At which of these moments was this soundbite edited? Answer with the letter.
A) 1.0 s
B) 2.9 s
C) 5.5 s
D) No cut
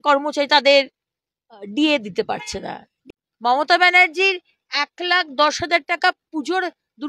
B